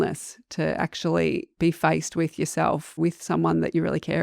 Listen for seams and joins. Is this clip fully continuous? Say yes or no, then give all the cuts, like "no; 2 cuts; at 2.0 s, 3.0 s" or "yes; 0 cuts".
no; 2 cuts; at 1.5 s, 3.0 s